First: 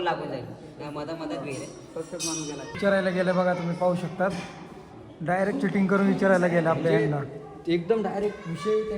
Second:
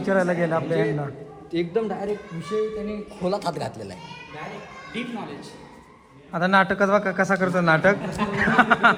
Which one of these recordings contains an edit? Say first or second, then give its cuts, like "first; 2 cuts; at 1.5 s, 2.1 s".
first; 1 cut; at 2.8 s